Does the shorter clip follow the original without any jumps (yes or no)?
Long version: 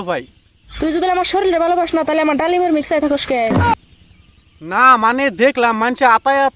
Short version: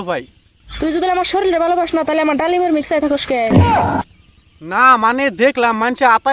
yes